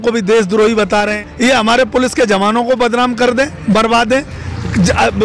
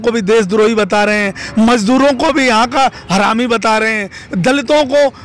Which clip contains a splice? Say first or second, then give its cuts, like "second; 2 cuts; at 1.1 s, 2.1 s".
first; 1 cut; at 1.2 s